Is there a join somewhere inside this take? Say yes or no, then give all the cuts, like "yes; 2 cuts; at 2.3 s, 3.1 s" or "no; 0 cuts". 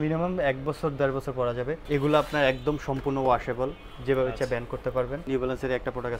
yes; 2 cuts; at 1.8 s, 5.2 s